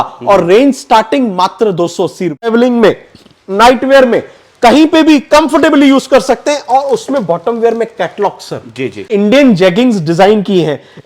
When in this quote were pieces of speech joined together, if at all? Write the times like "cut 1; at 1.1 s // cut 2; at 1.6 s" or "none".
cut 1; at 2.5 s // cut 2; at 9.1 s

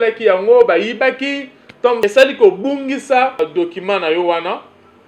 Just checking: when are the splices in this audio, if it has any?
cut 1; at 2.0 s // cut 2; at 3.4 s

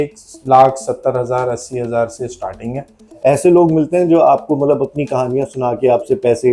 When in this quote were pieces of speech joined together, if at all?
cut 1; at 3.0 s

